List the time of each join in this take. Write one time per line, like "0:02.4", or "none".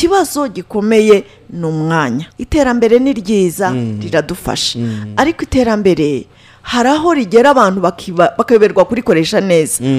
0:02.3